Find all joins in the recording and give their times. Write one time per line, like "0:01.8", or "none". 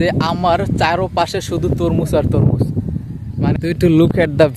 0:03.6